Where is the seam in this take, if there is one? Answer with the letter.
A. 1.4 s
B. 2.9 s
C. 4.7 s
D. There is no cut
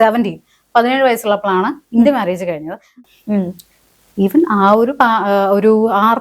B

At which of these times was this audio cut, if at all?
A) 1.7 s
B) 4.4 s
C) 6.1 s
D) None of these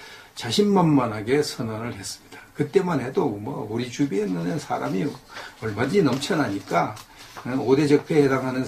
A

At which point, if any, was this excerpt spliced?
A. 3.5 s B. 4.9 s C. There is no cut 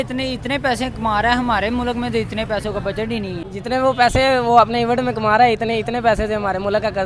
A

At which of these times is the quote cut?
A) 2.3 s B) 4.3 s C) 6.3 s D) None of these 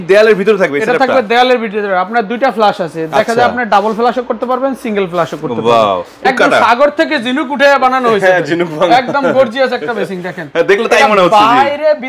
C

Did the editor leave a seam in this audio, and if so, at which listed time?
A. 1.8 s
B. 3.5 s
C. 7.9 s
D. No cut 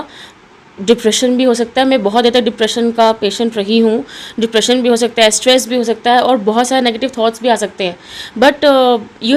D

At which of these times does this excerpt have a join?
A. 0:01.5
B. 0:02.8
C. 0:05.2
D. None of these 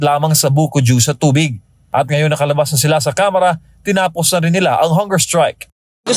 D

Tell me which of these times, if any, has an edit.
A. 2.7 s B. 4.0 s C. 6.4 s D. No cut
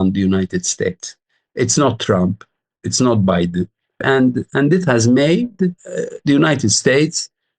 B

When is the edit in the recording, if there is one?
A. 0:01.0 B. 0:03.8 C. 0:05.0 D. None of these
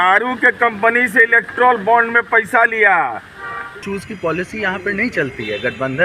B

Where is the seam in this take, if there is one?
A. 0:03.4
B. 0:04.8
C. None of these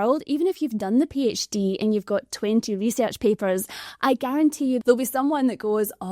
B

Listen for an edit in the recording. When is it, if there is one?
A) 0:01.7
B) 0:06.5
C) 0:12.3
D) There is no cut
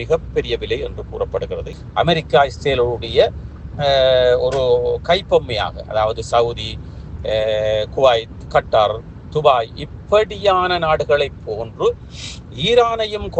A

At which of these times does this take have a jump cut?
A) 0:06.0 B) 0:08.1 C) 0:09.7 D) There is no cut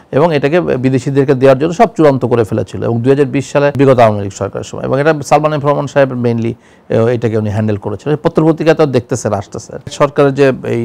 D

